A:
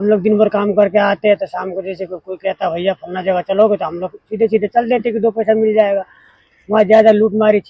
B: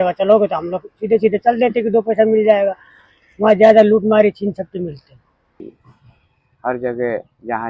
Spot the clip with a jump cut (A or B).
B